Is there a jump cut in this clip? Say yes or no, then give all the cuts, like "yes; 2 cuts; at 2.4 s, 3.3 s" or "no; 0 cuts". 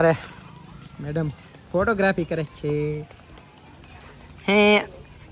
no; 0 cuts